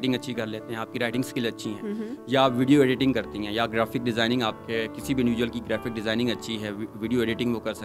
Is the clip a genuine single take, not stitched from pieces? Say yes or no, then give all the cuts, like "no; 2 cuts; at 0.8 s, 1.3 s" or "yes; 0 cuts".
yes; 0 cuts